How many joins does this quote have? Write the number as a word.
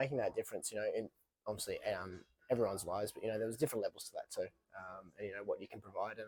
zero